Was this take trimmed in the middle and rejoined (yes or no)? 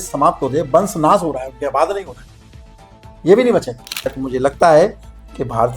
yes